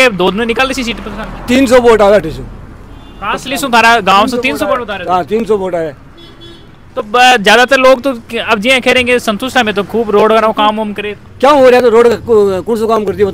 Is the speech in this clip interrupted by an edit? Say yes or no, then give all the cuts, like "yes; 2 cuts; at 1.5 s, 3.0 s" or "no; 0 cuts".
no; 0 cuts